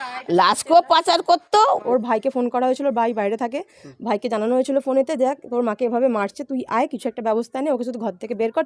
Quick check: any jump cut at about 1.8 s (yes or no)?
yes